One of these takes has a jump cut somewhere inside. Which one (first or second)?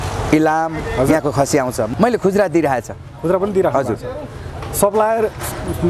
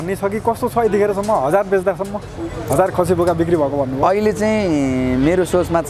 first